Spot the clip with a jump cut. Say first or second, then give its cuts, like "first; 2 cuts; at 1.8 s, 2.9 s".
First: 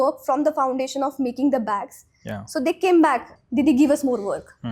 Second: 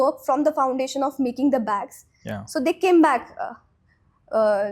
first; 1 cut; at 3.4 s